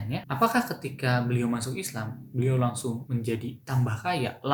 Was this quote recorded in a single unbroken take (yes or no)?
yes